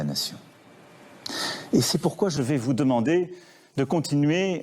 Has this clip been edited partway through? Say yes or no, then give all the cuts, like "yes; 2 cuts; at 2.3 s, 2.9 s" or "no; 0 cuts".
yes; 1 cut; at 2.3 s